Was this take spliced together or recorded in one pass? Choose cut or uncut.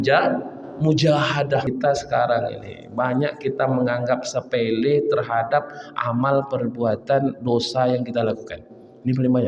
cut